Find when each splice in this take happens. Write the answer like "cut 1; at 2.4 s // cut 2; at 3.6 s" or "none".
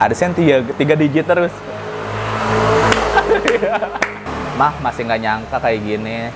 cut 1; at 4.3 s